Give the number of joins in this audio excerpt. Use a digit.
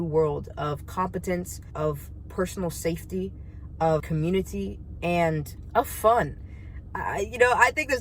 1